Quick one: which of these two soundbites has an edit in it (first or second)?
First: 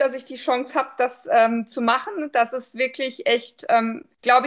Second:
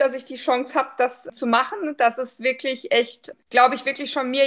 second